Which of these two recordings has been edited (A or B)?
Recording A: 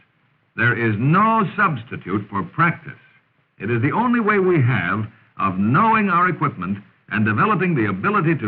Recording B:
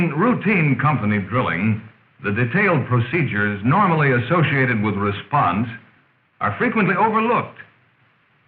B